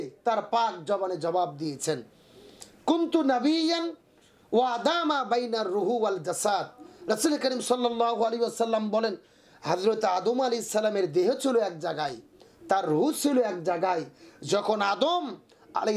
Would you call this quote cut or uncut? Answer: uncut